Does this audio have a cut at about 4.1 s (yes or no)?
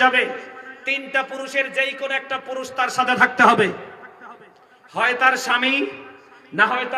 no